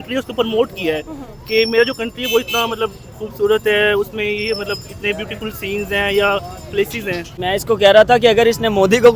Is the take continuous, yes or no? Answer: no